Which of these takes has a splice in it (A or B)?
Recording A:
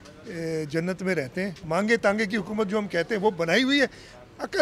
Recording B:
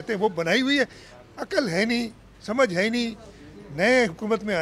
A